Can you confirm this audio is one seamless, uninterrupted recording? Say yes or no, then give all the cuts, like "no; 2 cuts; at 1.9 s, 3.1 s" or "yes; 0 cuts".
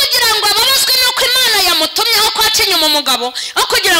yes; 0 cuts